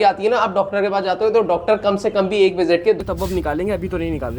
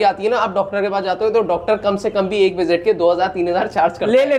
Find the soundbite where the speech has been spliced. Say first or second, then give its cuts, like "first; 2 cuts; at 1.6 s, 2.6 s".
first; 1 cut; at 3.0 s